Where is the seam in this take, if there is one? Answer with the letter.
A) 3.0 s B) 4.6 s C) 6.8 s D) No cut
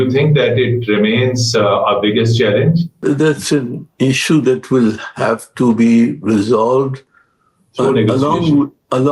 A